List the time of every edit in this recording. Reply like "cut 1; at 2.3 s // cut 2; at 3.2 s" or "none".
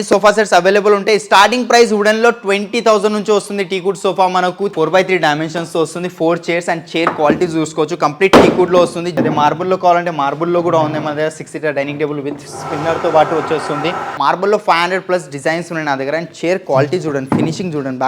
cut 1; at 4.7 s // cut 2; at 9.2 s // cut 3; at 14.1 s